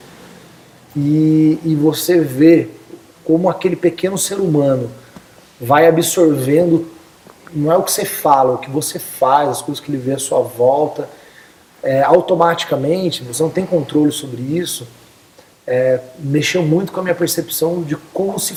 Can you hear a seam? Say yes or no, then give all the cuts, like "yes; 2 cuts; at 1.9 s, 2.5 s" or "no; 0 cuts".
no; 0 cuts